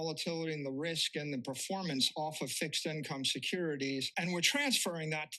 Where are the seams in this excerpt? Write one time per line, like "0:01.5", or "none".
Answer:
0:04.1